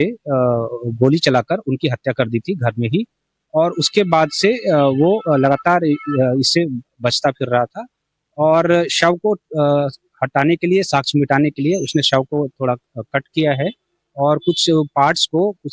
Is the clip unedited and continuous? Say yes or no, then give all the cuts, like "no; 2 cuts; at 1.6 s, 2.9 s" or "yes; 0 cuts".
yes; 0 cuts